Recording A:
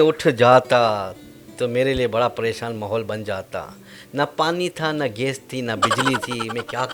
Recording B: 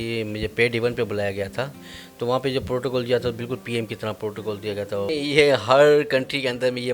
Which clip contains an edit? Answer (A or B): B